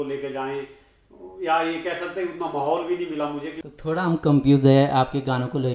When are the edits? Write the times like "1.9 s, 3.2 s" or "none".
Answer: 3.6 s